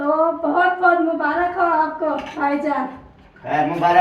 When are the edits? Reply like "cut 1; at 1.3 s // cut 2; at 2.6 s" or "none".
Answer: none